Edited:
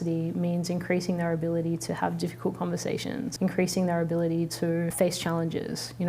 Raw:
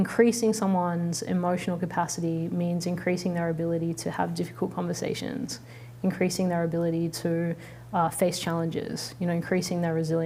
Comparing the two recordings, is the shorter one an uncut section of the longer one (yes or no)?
no